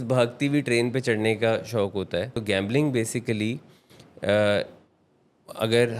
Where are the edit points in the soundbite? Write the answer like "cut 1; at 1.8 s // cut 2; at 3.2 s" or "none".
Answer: cut 1; at 2.4 s